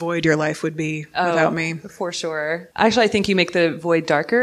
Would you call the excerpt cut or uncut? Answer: uncut